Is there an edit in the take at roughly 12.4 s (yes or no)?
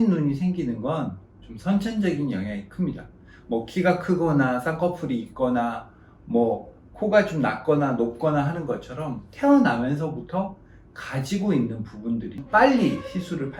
yes